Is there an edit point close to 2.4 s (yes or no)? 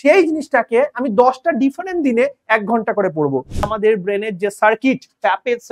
no